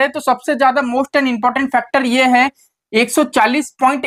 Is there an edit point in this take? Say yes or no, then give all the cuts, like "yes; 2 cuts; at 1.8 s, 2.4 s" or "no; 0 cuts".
no; 0 cuts